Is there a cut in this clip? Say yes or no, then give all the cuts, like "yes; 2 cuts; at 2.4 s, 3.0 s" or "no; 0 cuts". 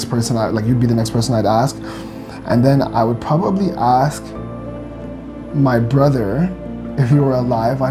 no; 0 cuts